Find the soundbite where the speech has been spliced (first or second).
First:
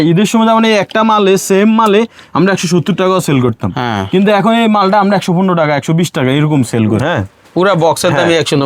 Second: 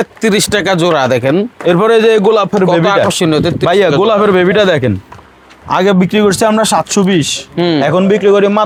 first